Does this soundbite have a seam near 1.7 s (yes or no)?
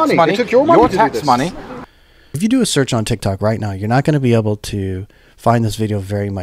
yes